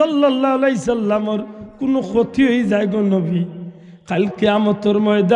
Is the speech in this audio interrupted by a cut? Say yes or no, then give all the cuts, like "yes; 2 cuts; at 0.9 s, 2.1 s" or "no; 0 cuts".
no; 0 cuts